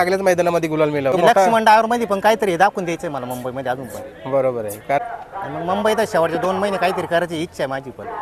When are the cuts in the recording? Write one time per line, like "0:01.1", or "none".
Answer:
0:01.2
0:05.0